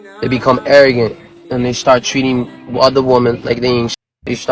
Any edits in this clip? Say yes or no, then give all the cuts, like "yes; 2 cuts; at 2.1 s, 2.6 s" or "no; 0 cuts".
no; 0 cuts